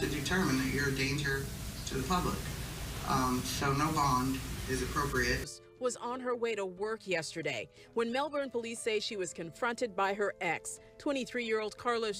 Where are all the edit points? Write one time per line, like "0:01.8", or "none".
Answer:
0:05.5